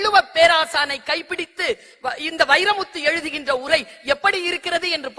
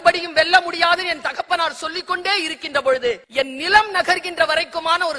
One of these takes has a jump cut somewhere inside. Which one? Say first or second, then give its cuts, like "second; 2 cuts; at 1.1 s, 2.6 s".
second; 1 cut; at 3.2 s